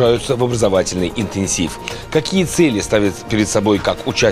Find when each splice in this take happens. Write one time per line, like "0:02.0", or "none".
none

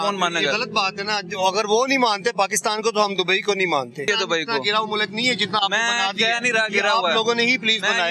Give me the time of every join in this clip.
0:04.1

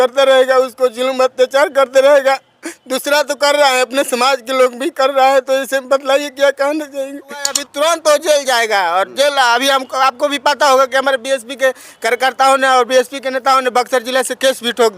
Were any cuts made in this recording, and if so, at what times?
0:07.6

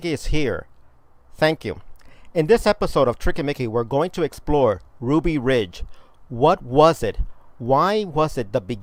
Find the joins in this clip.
none

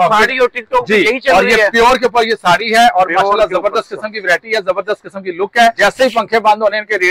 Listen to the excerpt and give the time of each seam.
0:05.8

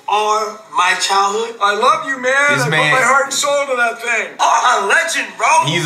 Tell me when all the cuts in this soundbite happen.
0:04.3

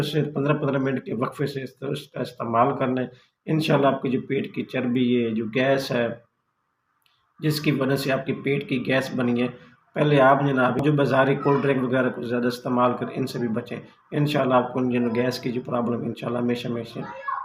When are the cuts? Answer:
none

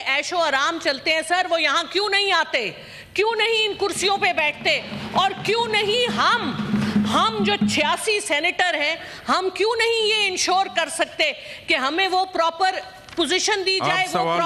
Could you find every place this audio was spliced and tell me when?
none

